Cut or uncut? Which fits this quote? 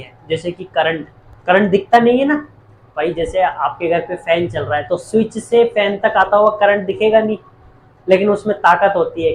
uncut